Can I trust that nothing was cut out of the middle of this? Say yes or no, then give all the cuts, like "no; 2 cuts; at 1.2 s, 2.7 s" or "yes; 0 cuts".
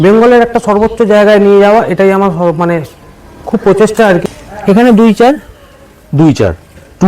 no; 1 cut; at 4.2 s